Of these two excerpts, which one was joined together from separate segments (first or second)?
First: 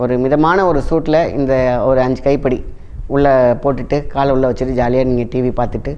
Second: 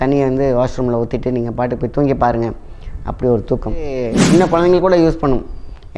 second